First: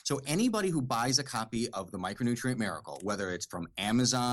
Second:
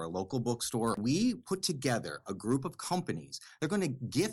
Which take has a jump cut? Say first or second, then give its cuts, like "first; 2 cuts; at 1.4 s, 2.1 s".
second; 2 cuts; at 1.0 s, 3.4 s